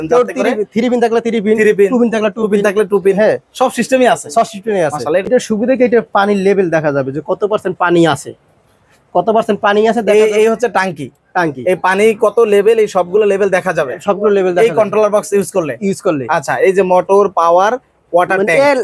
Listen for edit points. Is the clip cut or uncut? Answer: cut